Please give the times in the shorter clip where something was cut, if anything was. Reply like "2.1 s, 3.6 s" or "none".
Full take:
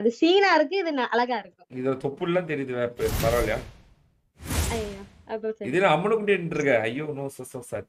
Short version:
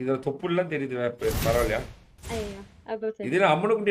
2.3 s